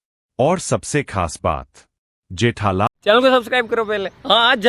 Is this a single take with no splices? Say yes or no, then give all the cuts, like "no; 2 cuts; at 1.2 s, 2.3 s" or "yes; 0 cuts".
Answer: no; 1 cut; at 2.9 s